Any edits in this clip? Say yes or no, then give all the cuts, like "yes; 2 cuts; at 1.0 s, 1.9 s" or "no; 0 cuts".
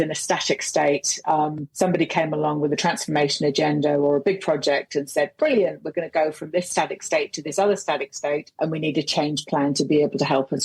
yes; 1 cut; at 1.6 s